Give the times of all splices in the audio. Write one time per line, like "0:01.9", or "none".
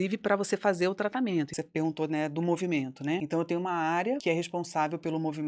0:01.5
0:03.2
0:04.2